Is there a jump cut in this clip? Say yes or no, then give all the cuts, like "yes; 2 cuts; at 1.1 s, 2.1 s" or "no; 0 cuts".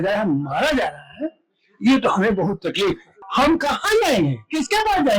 yes; 1 cut; at 3.1 s